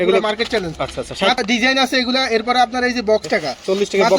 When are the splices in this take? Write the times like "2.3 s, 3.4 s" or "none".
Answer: 1.4 s, 3.2 s